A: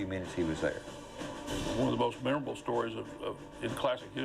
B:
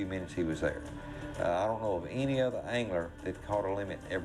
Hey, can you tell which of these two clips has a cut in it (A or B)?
A